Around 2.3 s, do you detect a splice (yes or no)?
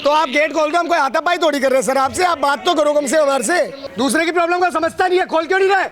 no